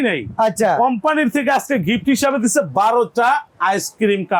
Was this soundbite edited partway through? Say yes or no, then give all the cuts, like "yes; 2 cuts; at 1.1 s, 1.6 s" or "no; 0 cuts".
no; 0 cuts